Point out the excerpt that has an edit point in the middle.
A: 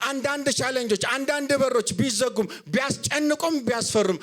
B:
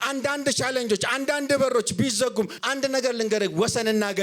B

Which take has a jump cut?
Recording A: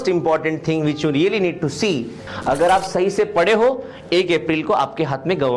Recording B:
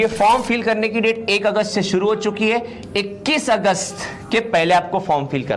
A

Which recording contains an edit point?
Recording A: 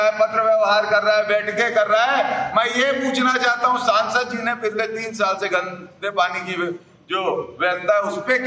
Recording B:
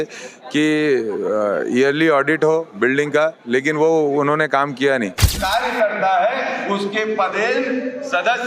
B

